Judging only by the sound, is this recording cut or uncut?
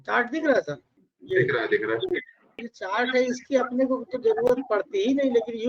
cut